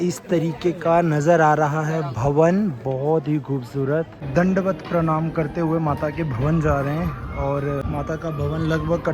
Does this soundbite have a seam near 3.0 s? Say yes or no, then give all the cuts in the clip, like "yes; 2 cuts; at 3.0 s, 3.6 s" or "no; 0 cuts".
no; 2 cuts; at 4.3 s, 7.8 s